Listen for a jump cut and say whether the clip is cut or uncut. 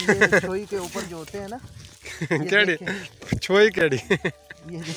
uncut